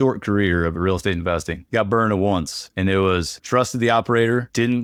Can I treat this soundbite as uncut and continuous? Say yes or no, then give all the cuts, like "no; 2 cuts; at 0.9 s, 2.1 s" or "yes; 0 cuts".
yes; 0 cuts